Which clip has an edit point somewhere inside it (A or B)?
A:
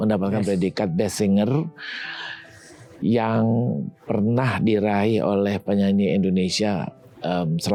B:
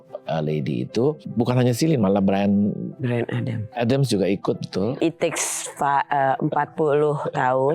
B